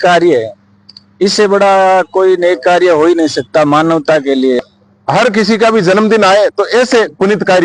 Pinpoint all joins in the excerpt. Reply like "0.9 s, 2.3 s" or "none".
4.6 s